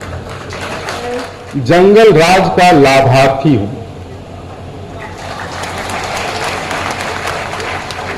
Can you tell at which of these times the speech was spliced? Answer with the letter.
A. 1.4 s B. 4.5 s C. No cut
A